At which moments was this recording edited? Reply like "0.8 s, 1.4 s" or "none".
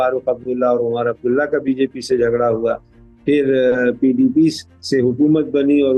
none